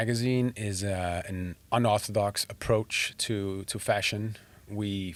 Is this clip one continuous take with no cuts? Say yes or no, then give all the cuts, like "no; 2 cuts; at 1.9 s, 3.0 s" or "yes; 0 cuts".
yes; 0 cuts